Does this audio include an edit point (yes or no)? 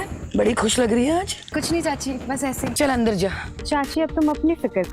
yes